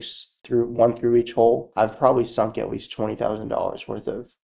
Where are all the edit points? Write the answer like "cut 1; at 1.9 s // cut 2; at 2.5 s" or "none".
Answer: cut 1; at 1.7 s